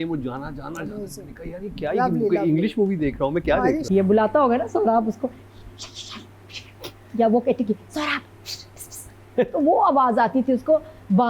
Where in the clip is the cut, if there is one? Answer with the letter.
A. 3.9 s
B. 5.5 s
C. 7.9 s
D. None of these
A